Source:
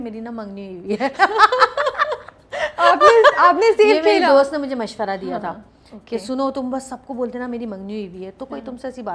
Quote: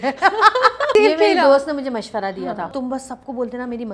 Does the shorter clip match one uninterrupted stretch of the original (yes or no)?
no